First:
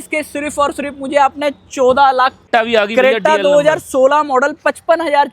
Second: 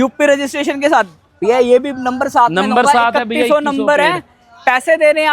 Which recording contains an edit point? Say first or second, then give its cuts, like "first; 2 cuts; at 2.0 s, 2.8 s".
first; 1 cut; at 2.4 s